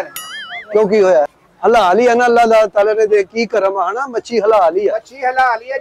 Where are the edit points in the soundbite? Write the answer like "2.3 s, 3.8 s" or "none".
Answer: 1.4 s